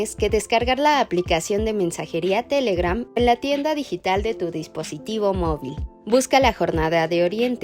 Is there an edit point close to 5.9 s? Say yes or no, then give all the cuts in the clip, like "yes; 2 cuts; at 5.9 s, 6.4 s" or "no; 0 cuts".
no; 0 cuts